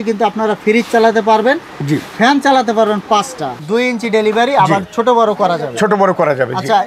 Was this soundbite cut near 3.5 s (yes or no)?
yes